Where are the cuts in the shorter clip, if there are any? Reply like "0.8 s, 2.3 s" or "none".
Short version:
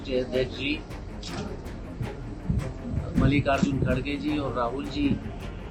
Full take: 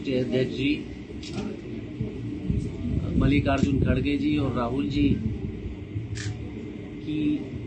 none